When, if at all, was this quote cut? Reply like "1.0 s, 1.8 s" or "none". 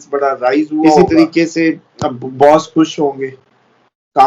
0.9 s